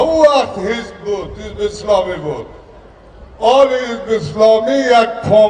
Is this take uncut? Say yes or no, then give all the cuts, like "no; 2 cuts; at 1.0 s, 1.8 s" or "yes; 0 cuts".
yes; 0 cuts